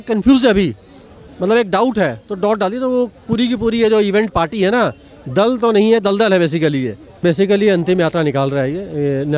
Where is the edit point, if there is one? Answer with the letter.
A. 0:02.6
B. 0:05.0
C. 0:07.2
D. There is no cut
C